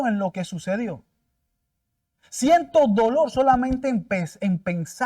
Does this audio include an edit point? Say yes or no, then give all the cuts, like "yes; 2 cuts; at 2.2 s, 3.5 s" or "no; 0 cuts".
no; 0 cuts